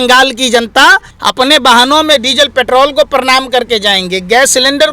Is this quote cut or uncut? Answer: cut